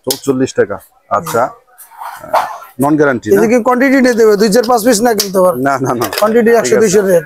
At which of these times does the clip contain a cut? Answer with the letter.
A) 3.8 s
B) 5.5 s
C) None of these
C